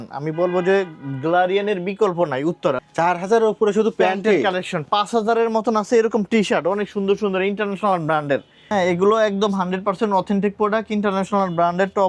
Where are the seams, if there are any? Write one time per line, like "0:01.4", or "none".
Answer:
0:02.8
0:08.6